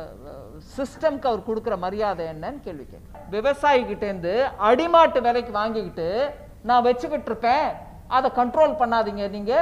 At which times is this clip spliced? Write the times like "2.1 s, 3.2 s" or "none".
3.2 s